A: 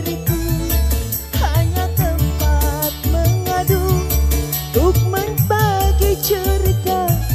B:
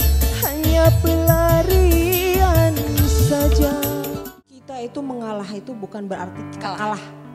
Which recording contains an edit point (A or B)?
B